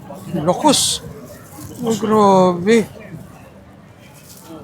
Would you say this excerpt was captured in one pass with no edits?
no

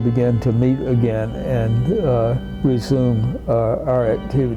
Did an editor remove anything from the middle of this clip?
no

